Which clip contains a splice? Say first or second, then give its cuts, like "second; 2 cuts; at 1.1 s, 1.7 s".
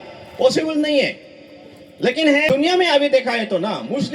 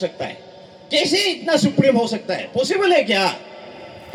first; 1 cut; at 2.5 s